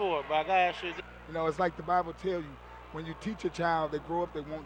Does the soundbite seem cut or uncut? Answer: uncut